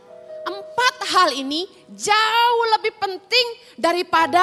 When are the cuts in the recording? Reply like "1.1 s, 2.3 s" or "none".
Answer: none